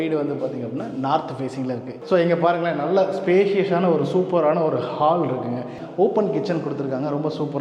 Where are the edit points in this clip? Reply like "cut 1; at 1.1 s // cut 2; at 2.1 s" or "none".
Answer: cut 1; at 1.9 s // cut 2; at 5.8 s